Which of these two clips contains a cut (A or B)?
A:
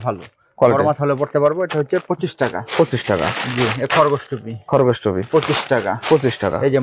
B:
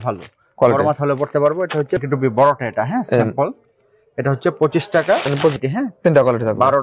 B